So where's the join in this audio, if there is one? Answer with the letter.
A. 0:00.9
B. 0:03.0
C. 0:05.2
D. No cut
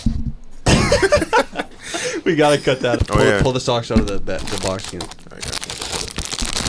B